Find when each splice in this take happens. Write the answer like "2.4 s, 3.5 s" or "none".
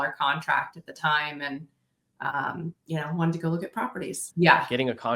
4.2 s